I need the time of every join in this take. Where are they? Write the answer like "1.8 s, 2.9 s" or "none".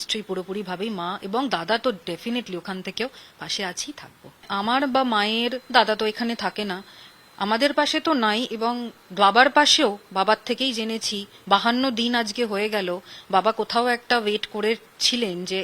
4.5 s